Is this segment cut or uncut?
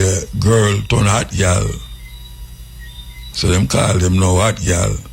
uncut